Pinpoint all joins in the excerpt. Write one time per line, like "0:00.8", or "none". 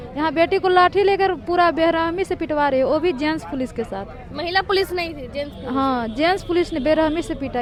none